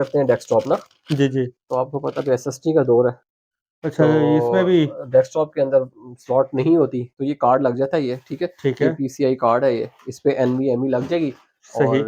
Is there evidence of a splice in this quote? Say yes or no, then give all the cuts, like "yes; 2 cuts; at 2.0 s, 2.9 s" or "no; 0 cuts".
no; 0 cuts